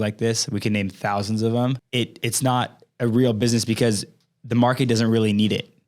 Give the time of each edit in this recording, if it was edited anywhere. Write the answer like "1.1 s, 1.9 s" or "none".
1.8 s